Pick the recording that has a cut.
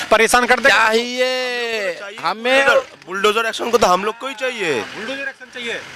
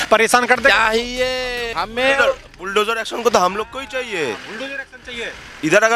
second; 1 cut; at 1.6 s

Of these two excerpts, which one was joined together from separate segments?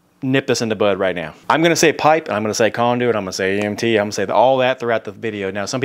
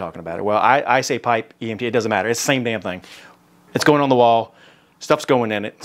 first; 1 cut; at 1.3 s

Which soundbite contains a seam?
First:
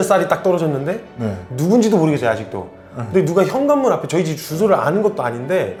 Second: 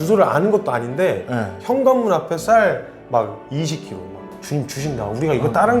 second; 1 cut; at 4.3 s

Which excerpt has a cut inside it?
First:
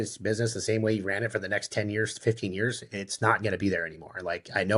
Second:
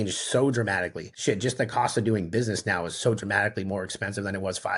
second; 1 cut; at 1.0 s

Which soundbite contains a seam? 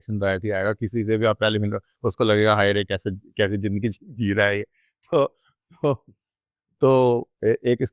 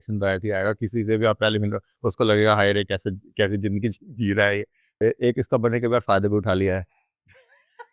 second; 1 cut; at 4.9 s

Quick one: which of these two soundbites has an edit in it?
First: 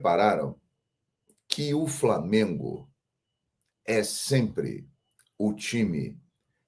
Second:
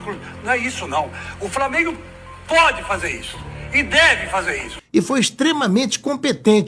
second; 1 cut; at 4.7 s

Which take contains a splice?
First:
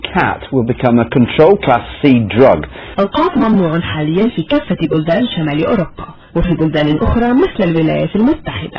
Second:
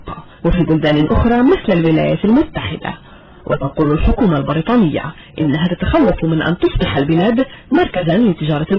first; 1 cut; at 2.8 s

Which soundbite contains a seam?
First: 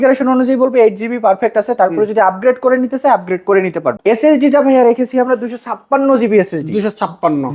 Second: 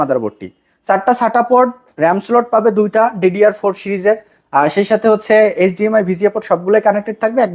first; 1 cut; at 4.0 s

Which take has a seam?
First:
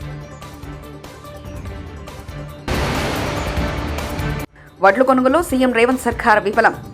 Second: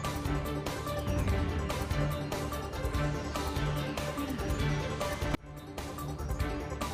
first; 2 cuts; at 2.7 s, 4.6 s

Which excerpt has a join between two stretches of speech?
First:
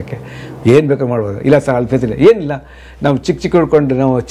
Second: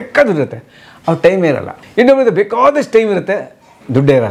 second; 1 cut; at 1.8 s

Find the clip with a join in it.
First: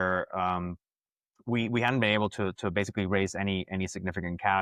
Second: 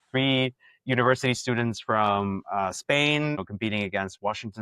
second; 1 cut; at 3.4 s

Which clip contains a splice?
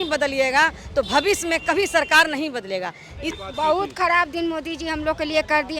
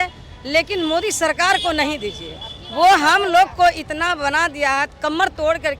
first; 1 cut; at 3.4 s

